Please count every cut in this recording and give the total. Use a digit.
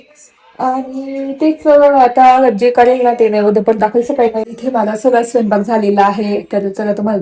1